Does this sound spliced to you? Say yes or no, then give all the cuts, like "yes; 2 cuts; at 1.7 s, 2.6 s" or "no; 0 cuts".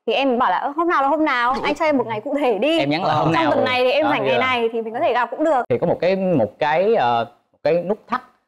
yes; 1 cut; at 5.7 s